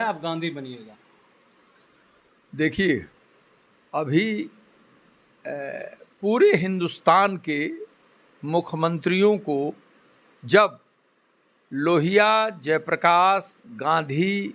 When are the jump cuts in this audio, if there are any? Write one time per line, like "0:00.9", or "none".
none